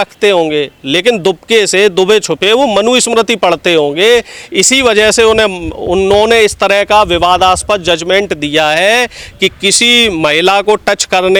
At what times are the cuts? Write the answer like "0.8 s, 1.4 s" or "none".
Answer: none